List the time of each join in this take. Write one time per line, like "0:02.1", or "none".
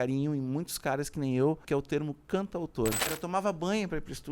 0:01.6
0:03.1